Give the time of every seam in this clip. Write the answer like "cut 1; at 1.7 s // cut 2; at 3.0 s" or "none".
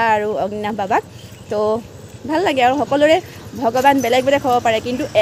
none

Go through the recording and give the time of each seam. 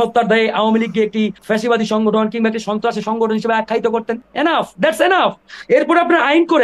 cut 1; at 1.4 s // cut 2; at 4.2 s // cut 3; at 5.5 s

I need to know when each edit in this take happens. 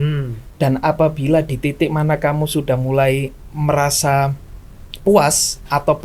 none

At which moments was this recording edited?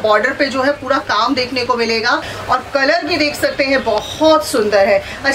cut 1; at 2.3 s

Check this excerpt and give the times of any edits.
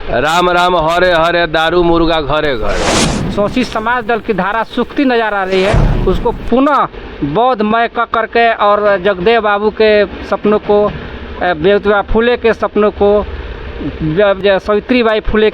cut 1; at 2.9 s // cut 2; at 14.4 s

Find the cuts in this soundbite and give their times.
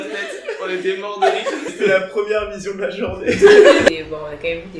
cut 1; at 1.7 s // cut 2; at 3.9 s

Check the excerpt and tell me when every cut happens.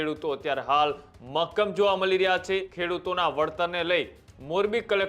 cut 1; at 2.7 s

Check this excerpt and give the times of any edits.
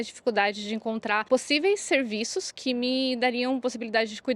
cut 1; at 1.3 s

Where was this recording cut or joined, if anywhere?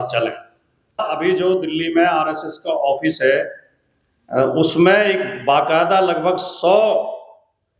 cut 1; at 1.0 s

